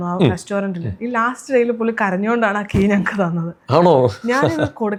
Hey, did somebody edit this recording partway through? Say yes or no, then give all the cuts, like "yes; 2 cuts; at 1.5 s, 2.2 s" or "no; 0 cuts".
no; 0 cuts